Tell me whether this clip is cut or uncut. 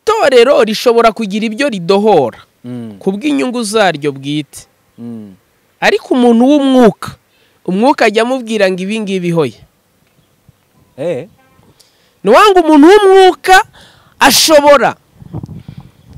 uncut